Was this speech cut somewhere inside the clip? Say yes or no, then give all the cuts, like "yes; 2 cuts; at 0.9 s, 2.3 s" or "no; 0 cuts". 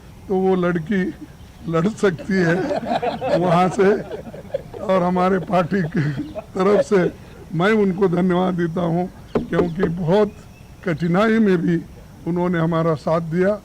no; 0 cuts